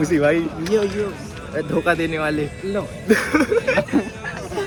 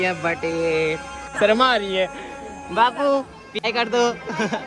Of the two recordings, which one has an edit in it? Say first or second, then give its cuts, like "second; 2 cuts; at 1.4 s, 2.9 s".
second; 2 cuts; at 1.3 s, 3.7 s